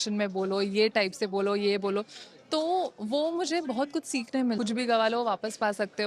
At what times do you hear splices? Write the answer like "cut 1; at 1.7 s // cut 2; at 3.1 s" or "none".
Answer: cut 1; at 4.6 s